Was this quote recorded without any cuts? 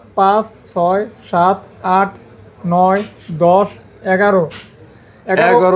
yes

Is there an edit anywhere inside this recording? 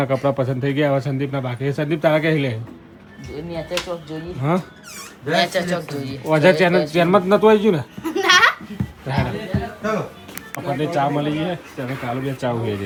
no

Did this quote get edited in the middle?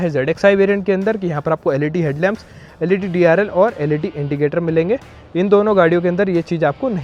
no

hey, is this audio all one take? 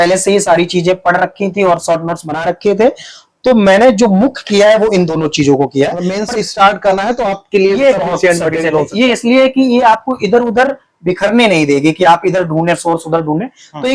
yes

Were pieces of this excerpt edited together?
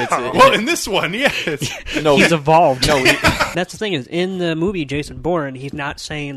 yes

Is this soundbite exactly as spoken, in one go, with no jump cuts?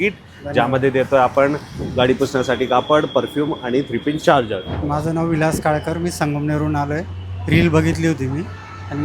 no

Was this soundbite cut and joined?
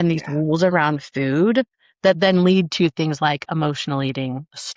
no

